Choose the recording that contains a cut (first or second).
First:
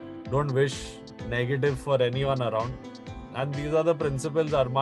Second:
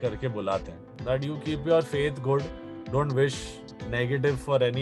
second